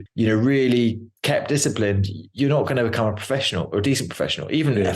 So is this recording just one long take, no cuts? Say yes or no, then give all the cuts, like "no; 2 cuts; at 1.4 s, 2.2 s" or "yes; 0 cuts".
yes; 0 cuts